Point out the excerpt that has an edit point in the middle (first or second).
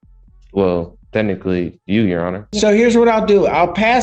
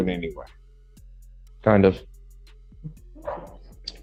first